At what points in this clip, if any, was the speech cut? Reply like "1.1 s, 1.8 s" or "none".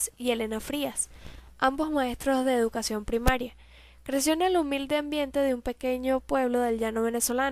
6.5 s